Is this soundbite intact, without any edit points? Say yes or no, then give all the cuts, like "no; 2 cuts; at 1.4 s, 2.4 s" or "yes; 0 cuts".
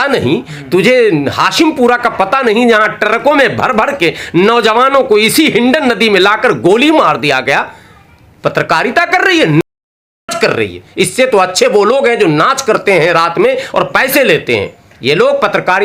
yes; 0 cuts